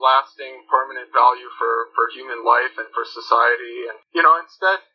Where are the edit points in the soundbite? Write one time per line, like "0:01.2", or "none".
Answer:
0:03.9